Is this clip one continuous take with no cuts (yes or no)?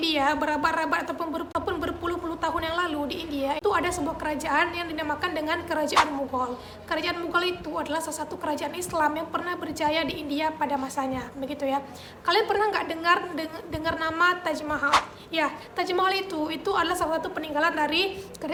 yes